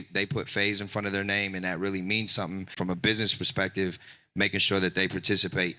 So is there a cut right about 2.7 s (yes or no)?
yes